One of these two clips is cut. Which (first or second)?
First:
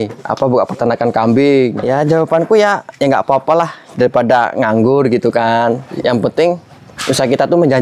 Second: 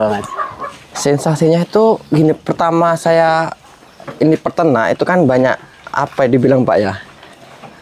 first